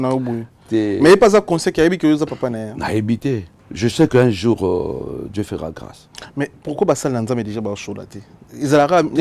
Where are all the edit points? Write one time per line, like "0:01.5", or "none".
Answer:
0:03.6